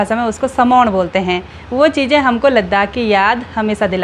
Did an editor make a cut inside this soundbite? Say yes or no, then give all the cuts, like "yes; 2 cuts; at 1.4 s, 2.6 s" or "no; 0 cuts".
no; 0 cuts